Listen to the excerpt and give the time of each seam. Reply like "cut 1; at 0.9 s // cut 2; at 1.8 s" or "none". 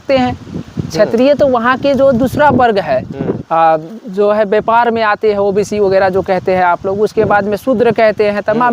cut 1; at 3.4 s